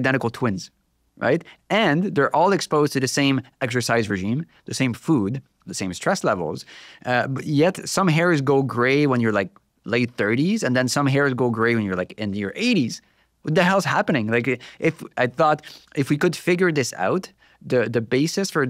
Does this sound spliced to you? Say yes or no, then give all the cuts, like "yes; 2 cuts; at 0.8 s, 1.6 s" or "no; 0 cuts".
no; 0 cuts